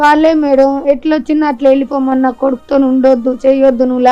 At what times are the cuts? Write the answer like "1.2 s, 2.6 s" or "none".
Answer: none